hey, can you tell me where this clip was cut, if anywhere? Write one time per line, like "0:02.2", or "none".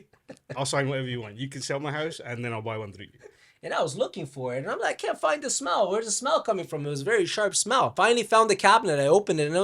0:03.3
0:07.9